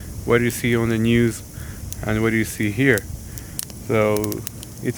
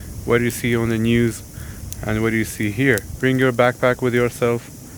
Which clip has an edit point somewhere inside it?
second; 1 cut; at 3.1 s

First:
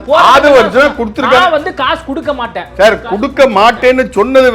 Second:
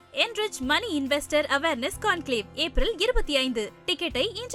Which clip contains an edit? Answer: first; 1 cut; at 2.7 s

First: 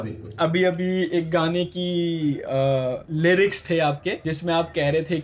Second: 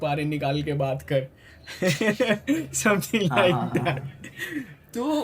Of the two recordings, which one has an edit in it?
first; 2 cuts; at 3.1 s, 4.3 s

